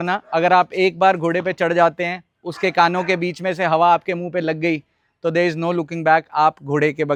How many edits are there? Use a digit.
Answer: 0